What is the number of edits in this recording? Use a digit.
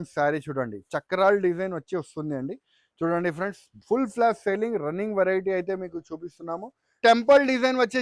1